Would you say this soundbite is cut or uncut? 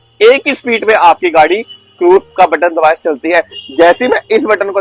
uncut